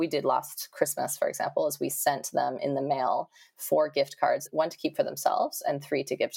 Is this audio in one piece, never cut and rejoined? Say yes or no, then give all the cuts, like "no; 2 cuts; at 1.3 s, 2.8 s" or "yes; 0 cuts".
no; 1 cut; at 4.5 s